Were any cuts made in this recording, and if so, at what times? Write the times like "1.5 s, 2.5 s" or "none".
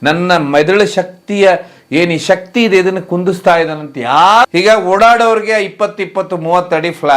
4.5 s